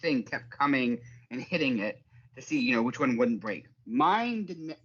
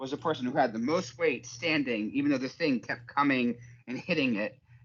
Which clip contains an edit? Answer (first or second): first